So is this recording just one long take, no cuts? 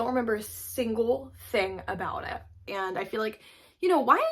no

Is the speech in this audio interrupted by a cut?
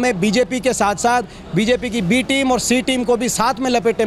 no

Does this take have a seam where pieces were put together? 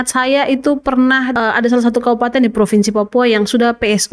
yes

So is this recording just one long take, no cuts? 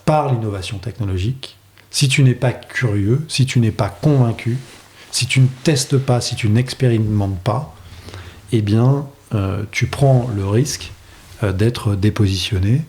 yes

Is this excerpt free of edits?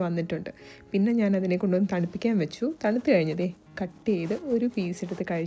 yes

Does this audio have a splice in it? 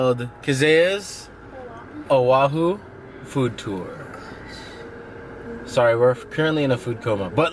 no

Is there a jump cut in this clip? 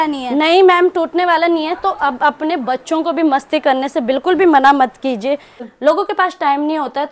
yes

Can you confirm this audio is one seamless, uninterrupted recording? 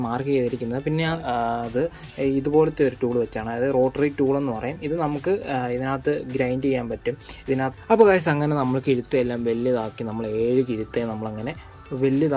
no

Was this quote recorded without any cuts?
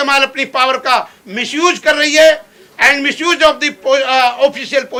yes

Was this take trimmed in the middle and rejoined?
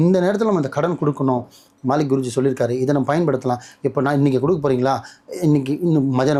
no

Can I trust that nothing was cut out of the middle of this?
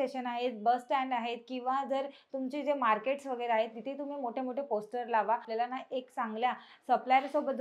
no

